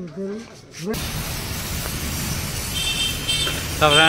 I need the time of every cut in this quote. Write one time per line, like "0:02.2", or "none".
0:01.0